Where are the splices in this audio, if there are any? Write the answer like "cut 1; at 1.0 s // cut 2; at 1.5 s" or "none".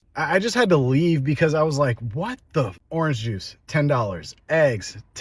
none